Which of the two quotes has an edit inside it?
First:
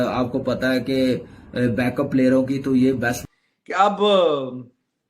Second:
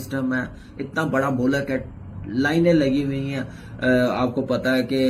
first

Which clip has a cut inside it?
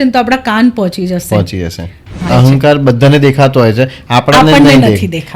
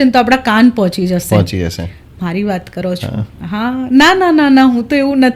first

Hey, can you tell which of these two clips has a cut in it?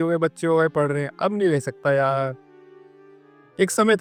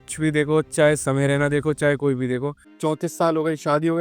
second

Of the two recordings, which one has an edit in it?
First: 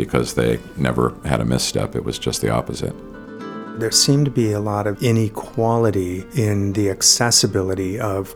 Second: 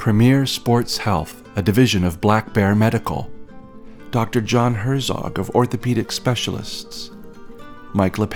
first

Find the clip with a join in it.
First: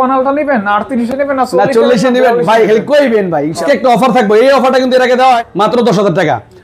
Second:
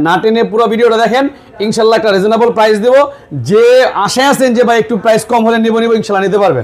first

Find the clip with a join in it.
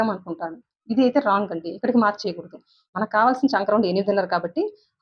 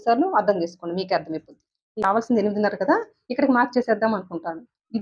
second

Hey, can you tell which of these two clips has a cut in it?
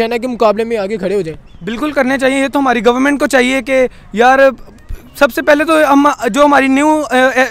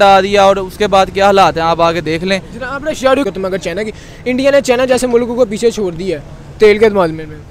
second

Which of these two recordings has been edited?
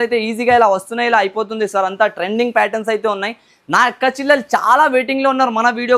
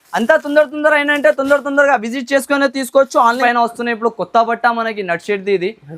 second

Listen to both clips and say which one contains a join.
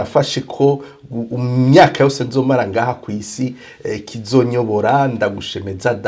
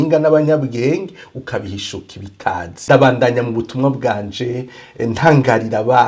second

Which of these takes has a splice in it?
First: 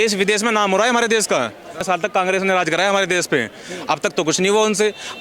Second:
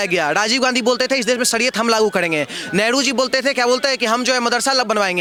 first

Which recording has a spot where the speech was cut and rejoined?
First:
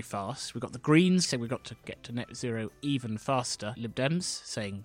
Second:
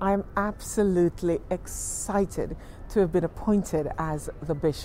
first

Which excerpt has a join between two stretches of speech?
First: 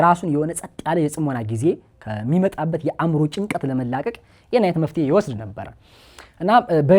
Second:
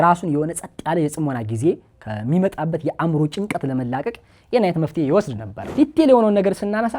second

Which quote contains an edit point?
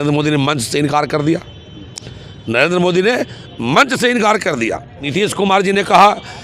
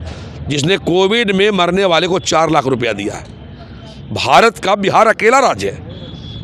first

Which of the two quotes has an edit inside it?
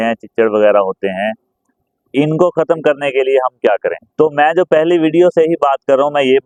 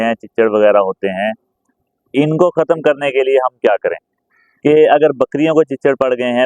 second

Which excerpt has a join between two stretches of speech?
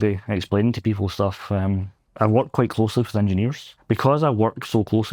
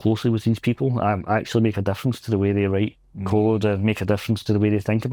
first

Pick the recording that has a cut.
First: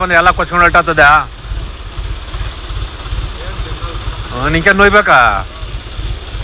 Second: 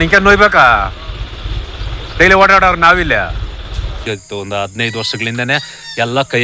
second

